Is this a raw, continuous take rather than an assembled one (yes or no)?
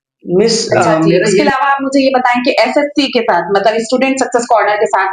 no